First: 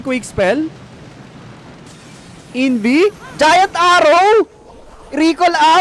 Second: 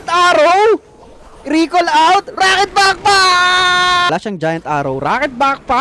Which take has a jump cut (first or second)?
second